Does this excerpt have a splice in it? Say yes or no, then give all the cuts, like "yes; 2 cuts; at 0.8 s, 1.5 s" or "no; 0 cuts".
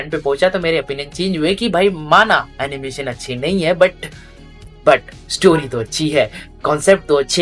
no; 0 cuts